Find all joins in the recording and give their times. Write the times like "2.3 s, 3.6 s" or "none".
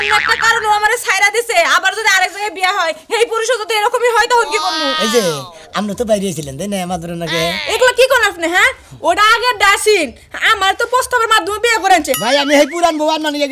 5.0 s, 12.2 s